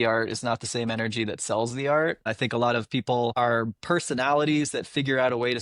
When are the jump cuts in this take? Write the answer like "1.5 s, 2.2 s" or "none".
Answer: 2.3 s